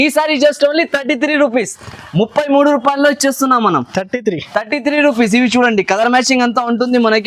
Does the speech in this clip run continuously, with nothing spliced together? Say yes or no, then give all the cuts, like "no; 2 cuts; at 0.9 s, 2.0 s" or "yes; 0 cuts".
yes; 0 cuts